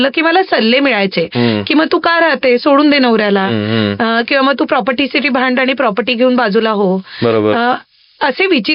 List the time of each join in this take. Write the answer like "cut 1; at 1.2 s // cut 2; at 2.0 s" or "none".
none